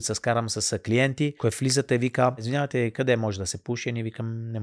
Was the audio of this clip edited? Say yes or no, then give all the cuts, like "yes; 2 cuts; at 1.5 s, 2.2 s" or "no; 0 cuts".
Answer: yes; 2 cuts; at 1.4 s, 2.5 s